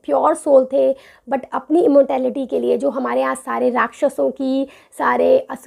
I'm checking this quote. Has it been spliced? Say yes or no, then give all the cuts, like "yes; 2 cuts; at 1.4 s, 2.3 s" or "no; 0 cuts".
no; 0 cuts